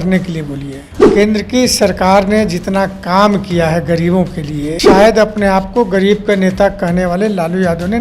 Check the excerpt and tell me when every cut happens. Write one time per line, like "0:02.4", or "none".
0:00.9
0:04.9